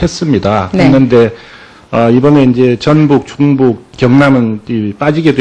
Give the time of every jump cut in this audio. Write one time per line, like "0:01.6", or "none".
none